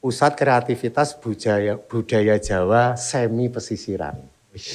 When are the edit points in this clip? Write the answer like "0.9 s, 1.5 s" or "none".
none